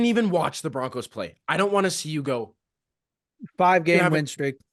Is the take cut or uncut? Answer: uncut